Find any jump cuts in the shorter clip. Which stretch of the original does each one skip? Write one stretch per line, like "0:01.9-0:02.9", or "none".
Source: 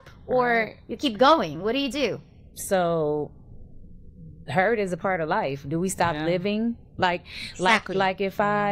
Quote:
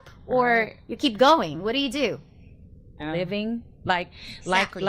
0:02.7-0:05.8